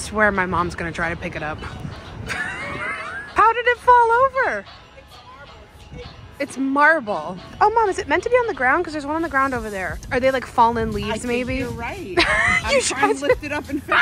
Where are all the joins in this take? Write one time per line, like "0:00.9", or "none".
0:03.3
0:07.4
0:10.0